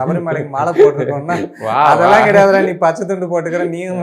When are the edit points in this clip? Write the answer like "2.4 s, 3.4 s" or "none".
none